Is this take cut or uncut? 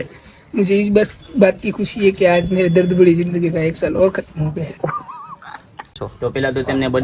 cut